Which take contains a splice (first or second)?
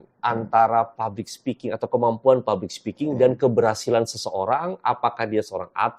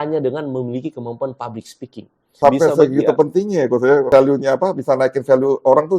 second